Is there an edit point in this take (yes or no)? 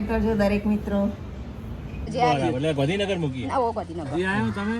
yes